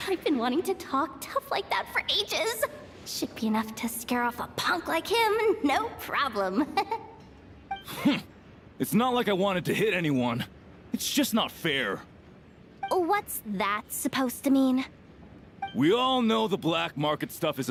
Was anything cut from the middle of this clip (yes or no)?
no